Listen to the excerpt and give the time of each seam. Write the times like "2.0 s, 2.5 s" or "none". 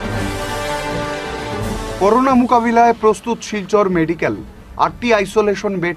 1.5 s